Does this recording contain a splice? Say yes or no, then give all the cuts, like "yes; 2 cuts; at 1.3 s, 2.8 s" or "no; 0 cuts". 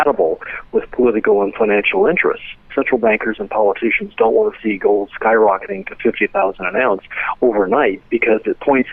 yes; 1 cut; at 2.6 s